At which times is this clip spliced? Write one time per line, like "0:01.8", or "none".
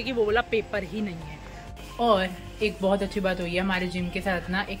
0:01.6